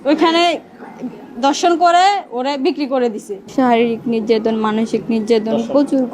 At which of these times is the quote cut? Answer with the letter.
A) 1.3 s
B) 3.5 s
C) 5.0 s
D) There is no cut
B